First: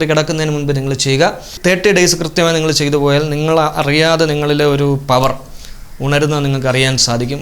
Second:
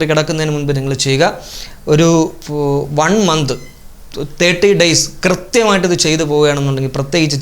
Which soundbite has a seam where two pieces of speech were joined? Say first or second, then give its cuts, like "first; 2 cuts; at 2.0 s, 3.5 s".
first; 1 cut; at 1.5 s